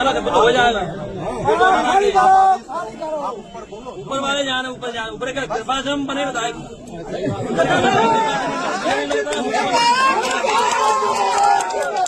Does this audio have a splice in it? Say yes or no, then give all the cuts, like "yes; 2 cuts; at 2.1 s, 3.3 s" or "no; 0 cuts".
no; 0 cuts